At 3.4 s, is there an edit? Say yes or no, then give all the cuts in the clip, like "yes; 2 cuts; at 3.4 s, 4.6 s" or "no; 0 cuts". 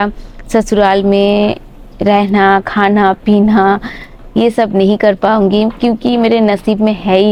no; 0 cuts